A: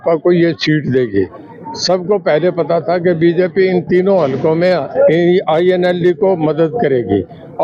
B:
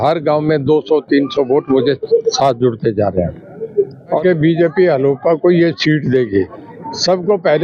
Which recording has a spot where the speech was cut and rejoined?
B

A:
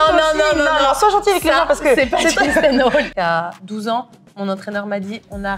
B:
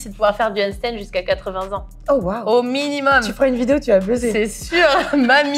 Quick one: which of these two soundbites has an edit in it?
A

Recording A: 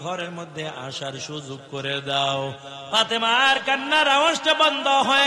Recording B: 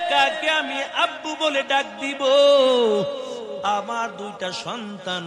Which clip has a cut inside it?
A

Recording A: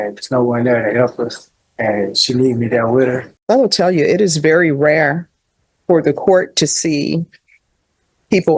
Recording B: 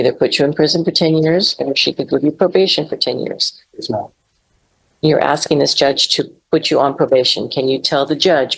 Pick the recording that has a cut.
A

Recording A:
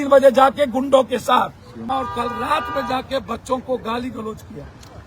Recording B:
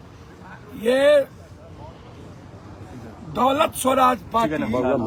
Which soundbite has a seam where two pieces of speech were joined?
A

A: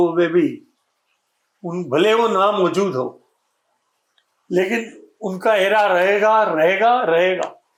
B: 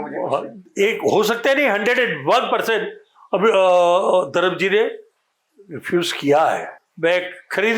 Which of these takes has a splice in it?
B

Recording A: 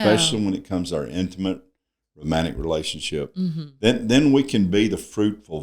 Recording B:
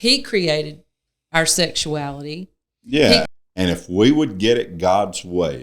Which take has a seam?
B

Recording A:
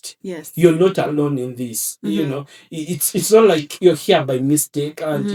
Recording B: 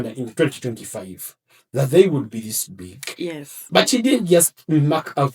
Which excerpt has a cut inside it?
B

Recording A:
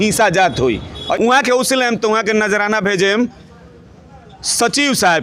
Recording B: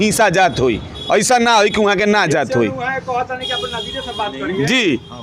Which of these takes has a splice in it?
A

